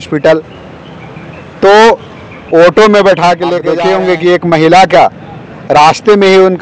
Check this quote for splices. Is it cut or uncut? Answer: cut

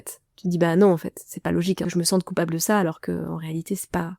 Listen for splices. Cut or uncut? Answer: cut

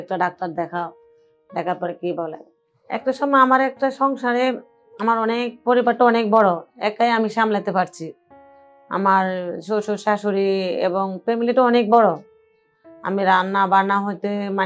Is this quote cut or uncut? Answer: cut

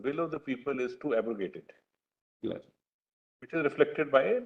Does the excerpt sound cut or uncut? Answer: uncut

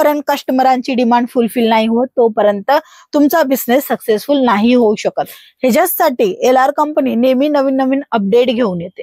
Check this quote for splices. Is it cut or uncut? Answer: uncut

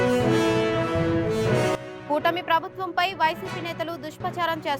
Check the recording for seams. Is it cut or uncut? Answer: uncut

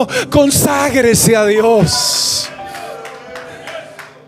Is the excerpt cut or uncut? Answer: uncut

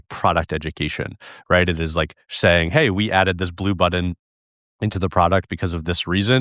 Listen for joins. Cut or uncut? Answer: uncut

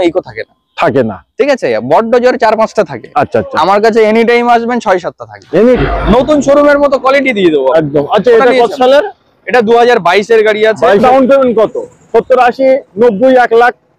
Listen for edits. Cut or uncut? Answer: cut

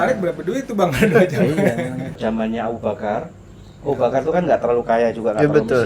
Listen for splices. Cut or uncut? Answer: cut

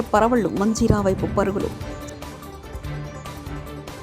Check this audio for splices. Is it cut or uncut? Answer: cut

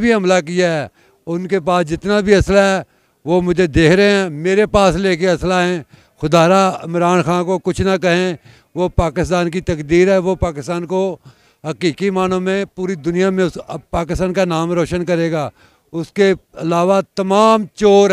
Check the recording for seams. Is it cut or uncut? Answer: uncut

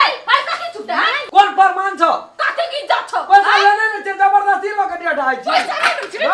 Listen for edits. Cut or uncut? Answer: cut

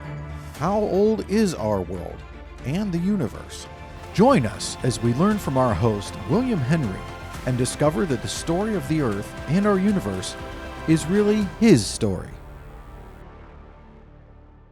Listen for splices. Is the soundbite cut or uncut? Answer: cut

